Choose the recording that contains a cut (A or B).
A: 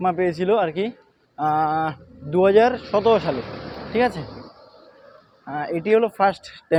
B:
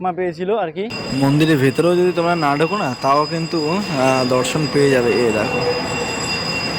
B